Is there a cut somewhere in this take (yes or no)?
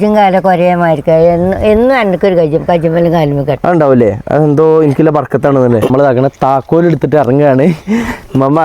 yes